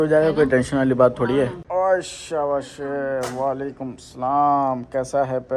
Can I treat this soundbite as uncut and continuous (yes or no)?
no